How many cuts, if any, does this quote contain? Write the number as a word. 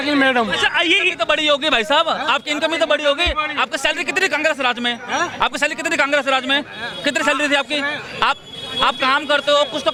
zero